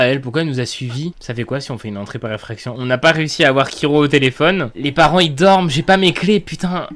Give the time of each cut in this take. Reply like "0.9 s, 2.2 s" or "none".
1.2 s, 4.8 s